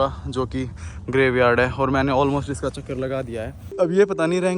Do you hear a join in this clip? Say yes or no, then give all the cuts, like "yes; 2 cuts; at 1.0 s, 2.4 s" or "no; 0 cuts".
yes; 1 cut; at 3.6 s